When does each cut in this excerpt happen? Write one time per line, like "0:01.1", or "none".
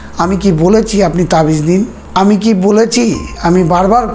0:02.0